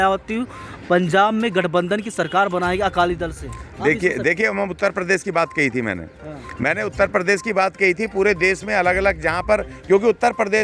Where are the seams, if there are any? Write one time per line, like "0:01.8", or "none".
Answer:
none